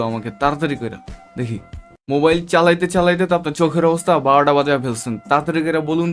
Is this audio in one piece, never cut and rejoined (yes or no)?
no